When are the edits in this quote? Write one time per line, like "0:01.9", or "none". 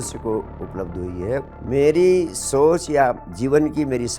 0:01.5